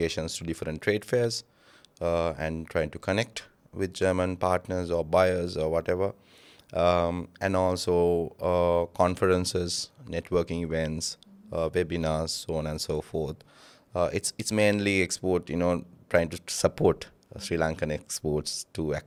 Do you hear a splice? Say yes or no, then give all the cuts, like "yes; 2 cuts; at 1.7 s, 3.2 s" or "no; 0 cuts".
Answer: no; 0 cuts